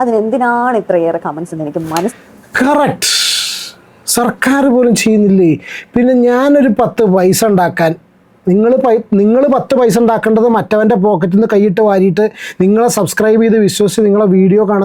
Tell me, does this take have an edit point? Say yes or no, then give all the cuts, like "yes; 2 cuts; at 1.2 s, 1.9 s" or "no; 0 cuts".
no; 0 cuts